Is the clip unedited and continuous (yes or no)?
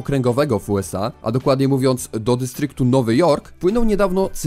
no